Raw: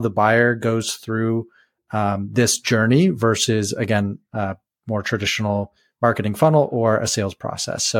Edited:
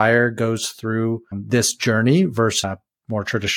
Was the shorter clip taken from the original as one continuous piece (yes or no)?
no